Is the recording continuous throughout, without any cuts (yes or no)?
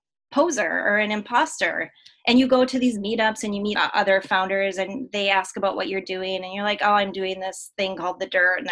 no